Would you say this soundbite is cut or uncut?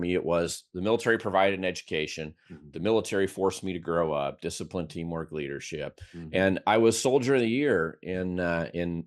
uncut